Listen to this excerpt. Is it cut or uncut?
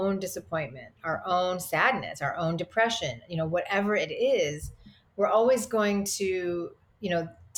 uncut